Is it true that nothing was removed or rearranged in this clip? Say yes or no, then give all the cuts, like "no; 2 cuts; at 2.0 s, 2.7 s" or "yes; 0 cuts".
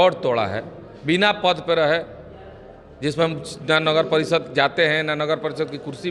yes; 0 cuts